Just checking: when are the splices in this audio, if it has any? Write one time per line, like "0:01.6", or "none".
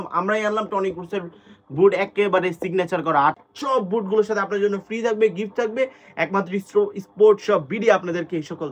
0:03.4